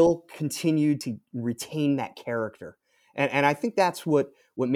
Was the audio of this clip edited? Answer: yes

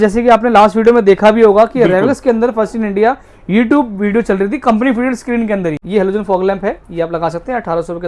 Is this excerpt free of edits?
no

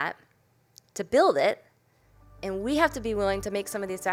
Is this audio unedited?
yes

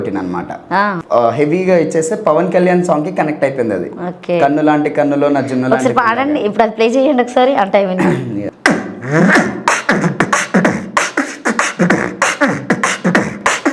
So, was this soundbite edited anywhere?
yes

